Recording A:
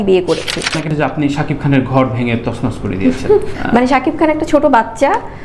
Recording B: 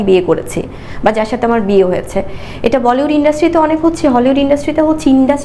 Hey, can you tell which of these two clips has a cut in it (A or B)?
A